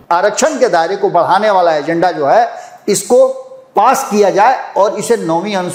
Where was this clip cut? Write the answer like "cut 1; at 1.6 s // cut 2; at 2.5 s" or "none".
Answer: none